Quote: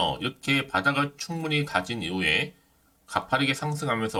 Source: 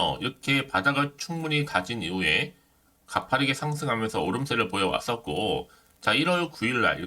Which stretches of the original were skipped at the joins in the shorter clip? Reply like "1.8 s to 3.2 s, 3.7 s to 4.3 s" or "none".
none